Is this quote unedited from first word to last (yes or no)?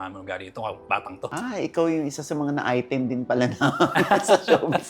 no